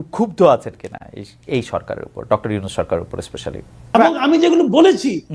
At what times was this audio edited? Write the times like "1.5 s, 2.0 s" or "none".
3.9 s